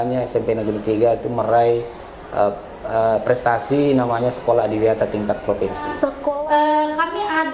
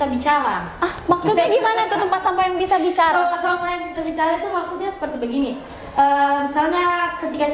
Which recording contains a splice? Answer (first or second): first